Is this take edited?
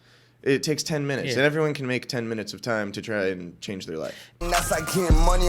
yes; 1 cut; at 4.4 s

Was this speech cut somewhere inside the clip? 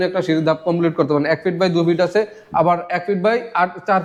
no; 0 cuts

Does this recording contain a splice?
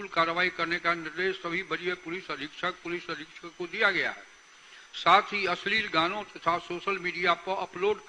no; 0 cuts

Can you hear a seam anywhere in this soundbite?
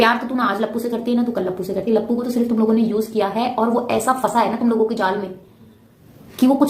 no; 0 cuts

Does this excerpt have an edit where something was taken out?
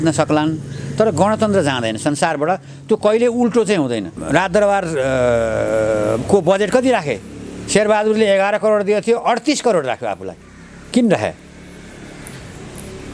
yes; 1 cut; at 4.2 s

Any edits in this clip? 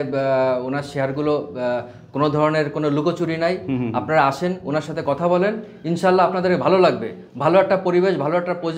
no; 0 cuts

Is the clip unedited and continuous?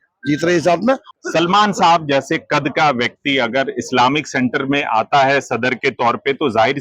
no; 1 cut; at 1.1 s

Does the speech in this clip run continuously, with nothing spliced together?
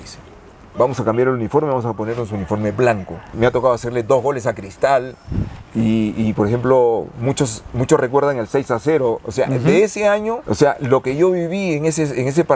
no; 2 cuts; at 3.3 s, 10.4 s

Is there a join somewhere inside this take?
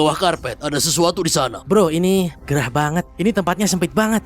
yes; 1 cut; at 1.6 s

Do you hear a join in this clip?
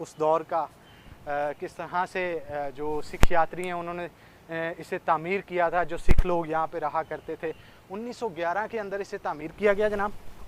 no; 0 cuts

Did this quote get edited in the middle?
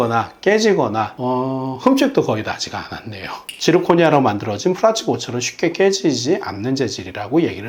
yes; 1 cut; at 3.5 s

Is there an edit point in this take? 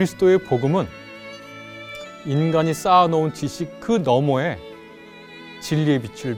no; 0 cuts

